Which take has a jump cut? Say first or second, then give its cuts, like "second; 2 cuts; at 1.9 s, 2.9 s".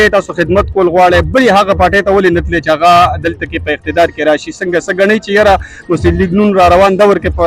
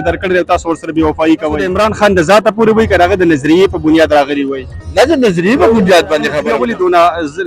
second; 2 cuts; at 1.7 s, 6.4 s